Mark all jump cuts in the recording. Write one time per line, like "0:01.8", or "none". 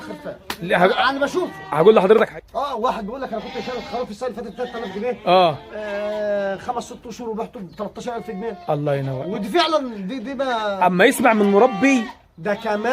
0:02.4